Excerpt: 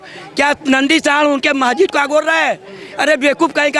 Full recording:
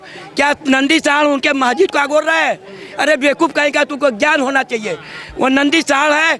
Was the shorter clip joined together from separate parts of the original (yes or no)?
no